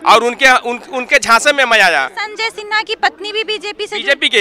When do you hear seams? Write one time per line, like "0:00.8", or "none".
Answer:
0:02.2